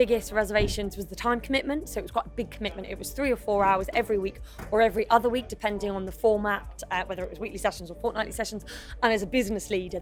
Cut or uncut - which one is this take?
uncut